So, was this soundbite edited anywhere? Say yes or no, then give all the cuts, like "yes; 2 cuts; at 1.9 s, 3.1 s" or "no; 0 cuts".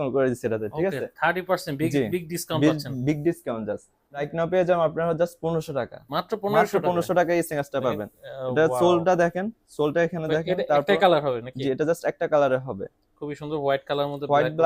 yes; 1 cut; at 4.3 s